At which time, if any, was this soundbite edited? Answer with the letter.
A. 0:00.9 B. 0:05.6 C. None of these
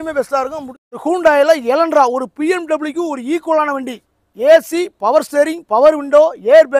A